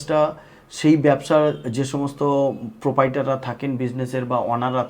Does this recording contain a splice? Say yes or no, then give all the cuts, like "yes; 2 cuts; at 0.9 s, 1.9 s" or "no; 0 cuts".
no; 0 cuts